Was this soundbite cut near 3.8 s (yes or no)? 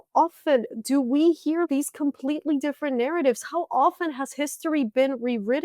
no